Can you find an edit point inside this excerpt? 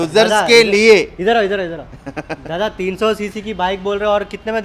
no; 0 cuts

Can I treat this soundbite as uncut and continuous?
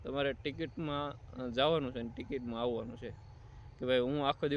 yes; 0 cuts

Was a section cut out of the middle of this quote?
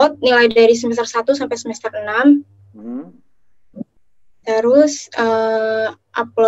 no; 0 cuts

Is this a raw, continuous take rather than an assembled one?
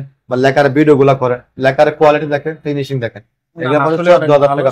yes; 0 cuts

